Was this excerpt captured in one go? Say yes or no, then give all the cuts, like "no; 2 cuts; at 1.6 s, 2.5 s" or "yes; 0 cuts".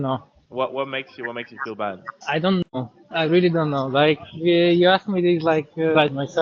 yes; 0 cuts